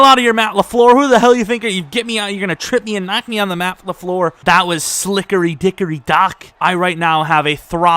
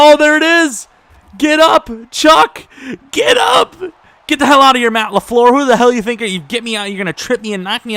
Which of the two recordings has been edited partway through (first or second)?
first